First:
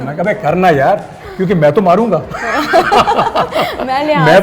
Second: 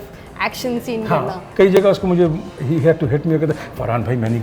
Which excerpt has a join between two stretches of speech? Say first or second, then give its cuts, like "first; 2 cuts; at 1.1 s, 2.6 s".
second; 1 cut; at 1.4 s